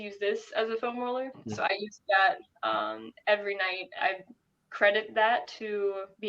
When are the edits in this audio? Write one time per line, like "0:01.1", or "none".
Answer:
0:01.4
0:03.8